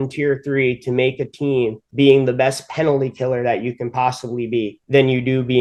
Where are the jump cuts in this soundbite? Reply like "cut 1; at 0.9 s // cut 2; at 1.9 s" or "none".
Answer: none